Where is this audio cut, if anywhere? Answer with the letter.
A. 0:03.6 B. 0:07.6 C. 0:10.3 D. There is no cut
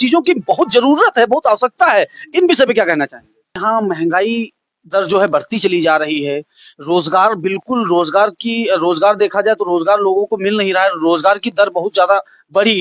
A